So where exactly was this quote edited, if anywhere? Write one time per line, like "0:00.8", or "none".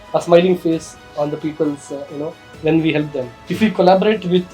0:03.4